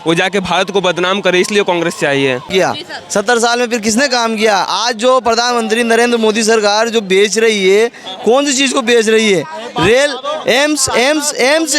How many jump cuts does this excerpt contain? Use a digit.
1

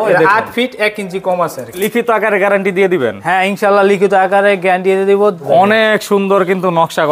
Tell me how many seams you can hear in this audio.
2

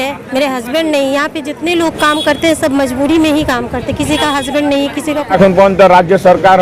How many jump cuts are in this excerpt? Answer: 1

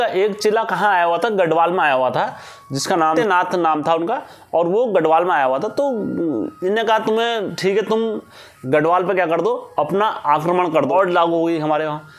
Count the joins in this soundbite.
2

